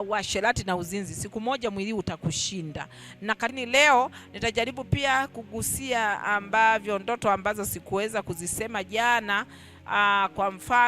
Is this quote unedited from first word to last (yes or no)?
no